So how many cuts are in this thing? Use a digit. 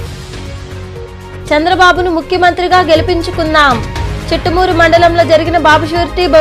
1